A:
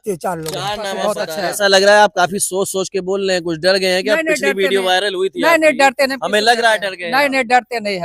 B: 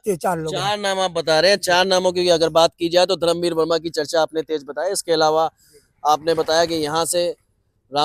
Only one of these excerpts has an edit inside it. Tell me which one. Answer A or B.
A